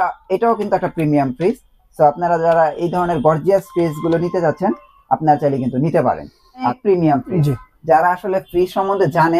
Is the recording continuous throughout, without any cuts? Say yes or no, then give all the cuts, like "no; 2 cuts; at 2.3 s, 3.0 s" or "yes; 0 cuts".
no; 1 cut; at 6.5 s